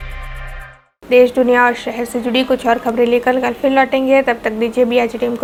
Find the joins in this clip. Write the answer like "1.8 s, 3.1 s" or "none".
none